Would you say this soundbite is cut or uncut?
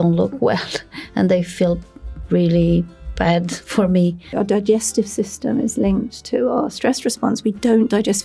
cut